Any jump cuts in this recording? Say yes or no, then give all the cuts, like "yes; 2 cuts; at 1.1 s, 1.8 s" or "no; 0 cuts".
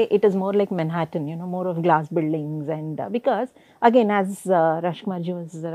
no; 0 cuts